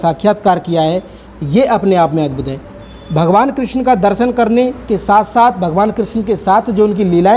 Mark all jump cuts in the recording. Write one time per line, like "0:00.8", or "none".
none